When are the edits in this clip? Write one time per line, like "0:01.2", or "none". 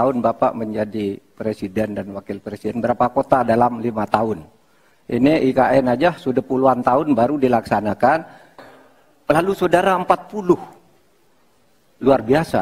0:08.5